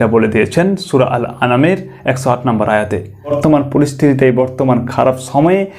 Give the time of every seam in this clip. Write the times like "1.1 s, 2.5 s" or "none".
3.4 s